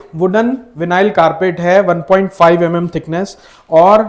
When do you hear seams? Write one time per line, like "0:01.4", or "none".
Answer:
none